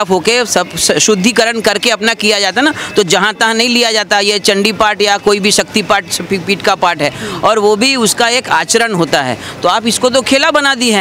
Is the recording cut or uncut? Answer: uncut